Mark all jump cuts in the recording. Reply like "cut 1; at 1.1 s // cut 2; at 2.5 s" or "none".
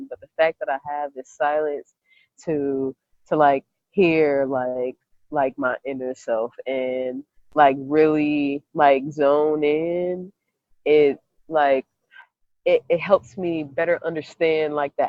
none